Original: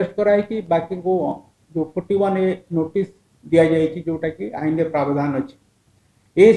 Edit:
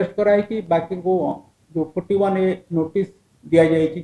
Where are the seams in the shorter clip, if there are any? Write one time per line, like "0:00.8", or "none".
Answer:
none